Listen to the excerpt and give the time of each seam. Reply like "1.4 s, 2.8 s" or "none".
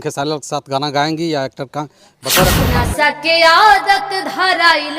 2.6 s